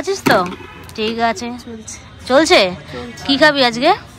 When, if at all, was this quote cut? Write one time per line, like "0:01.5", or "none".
none